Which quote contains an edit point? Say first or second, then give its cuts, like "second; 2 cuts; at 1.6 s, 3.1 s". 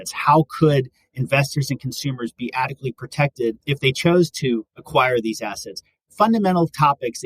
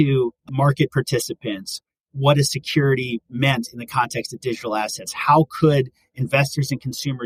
first; 2 cuts; at 3.6 s, 4.8 s